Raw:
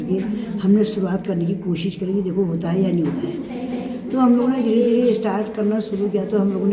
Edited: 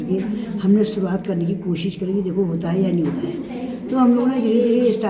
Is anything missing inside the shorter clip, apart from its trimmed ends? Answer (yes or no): yes